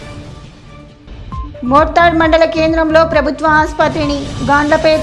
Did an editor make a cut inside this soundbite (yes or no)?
no